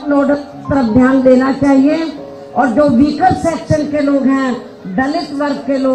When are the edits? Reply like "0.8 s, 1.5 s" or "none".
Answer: none